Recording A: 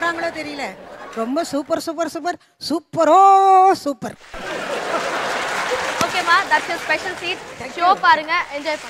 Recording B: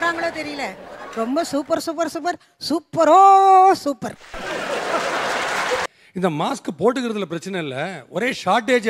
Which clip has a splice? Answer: B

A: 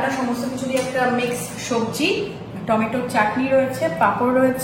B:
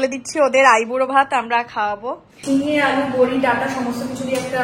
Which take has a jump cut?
B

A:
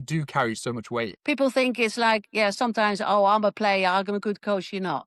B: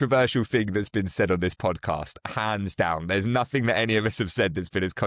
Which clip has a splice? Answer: A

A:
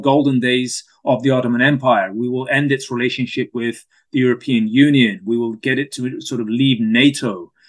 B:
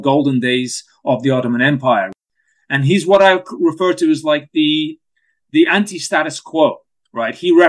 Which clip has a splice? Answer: B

